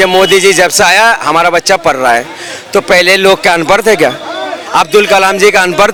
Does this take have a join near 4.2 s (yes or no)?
no